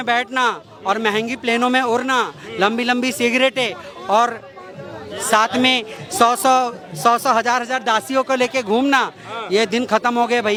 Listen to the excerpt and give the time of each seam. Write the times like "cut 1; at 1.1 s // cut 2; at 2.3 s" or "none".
none

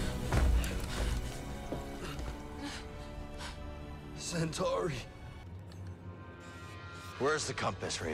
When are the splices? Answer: cut 1; at 5.4 s

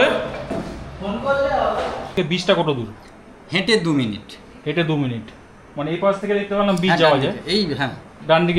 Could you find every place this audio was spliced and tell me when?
cut 1; at 2.2 s

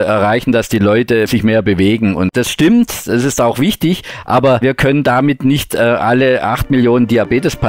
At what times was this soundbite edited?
cut 1; at 1.3 s // cut 2; at 2.3 s // cut 3; at 4.6 s

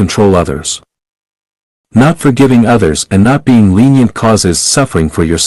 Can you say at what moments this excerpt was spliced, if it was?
none

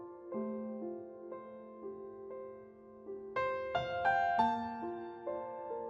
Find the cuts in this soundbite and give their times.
none

